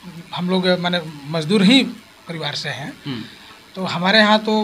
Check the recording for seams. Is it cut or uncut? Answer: uncut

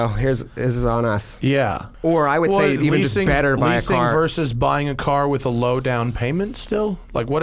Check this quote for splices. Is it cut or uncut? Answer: cut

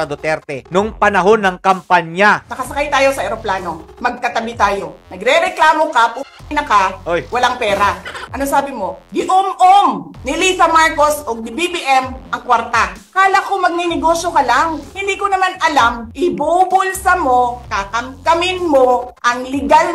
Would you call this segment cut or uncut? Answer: cut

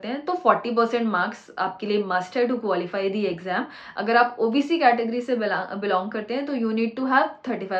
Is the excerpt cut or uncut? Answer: uncut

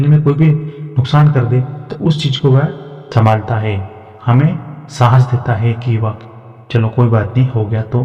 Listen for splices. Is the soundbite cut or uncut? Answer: uncut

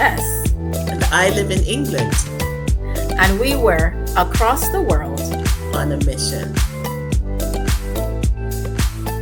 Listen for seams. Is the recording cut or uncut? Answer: uncut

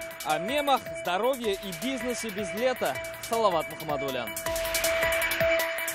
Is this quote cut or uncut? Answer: uncut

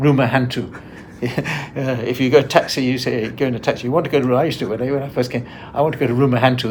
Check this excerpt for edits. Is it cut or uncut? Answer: uncut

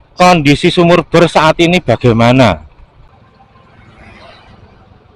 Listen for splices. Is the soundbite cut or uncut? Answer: cut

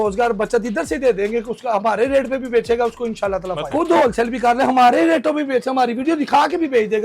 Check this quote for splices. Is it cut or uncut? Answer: cut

